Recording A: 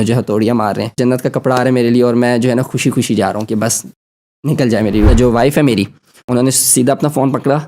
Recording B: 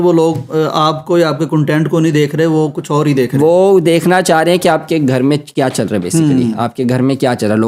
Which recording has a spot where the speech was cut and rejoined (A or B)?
A